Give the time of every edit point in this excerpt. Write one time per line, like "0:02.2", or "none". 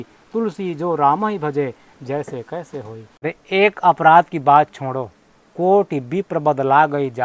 0:03.2